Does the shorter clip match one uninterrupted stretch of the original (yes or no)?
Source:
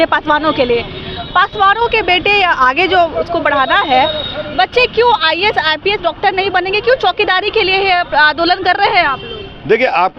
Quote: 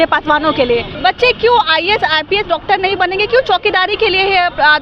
no